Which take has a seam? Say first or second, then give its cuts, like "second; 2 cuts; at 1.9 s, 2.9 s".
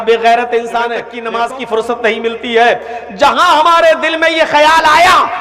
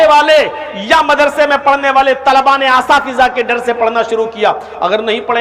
first; 1 cut; at 1.1 s